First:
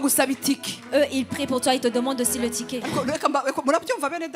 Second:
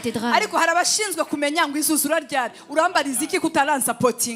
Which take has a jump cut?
first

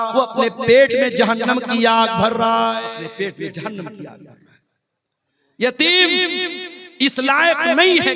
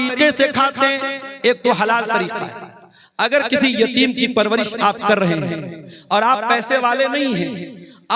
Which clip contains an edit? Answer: first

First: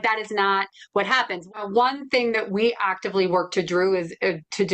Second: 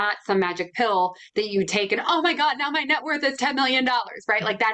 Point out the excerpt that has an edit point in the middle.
first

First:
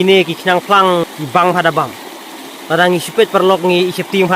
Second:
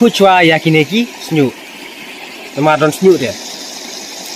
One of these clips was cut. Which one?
first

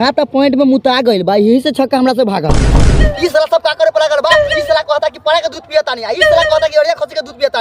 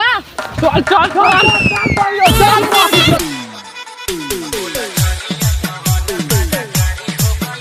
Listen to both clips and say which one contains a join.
first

